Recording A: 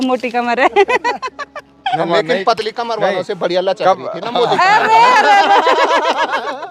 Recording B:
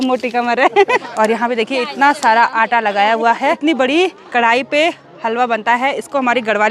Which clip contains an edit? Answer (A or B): B